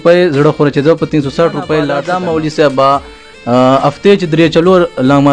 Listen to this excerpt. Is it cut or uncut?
cut